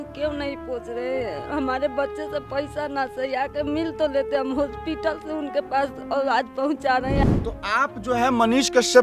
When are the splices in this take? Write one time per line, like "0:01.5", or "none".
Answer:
0:07.2